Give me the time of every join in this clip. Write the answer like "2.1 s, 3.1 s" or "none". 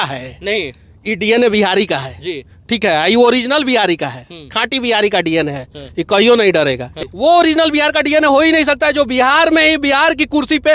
6.9 s